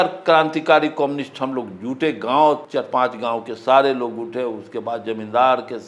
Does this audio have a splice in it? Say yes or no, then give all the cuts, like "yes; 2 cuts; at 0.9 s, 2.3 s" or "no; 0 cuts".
yes; 1 cut; at 2.7 s